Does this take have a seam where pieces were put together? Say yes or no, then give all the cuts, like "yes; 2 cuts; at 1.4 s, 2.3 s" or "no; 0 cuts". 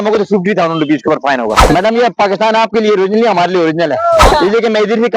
yes; 2 cuts; at 1.6 s, 4.3 s